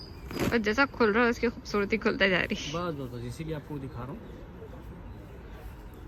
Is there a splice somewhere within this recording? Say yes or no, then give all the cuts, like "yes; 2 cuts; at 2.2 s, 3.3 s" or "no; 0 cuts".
no; 0 cuts